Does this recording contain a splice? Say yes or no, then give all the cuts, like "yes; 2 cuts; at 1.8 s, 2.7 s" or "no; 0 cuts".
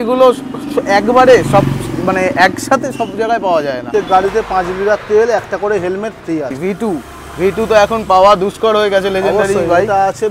yes; 2 cuts; at 3.8 s, 6.5 s